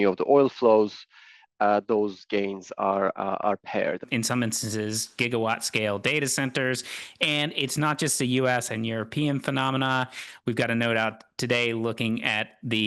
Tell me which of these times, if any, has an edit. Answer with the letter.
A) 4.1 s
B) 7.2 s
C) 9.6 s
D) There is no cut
A